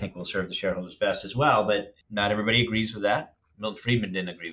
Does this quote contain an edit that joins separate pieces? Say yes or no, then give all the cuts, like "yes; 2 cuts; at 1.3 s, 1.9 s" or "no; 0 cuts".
yes; 1 cut; at 2.0 s